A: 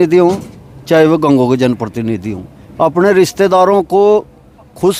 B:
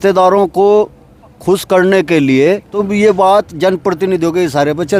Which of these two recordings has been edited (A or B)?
B